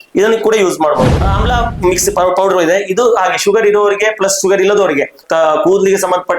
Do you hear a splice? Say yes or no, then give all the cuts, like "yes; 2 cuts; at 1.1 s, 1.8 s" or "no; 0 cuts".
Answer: yes; 2 cuts; at 1.1 s, 5.2 s